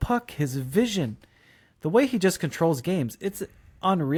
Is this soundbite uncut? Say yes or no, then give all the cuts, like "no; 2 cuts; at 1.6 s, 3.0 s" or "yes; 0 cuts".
yes; 0 cuts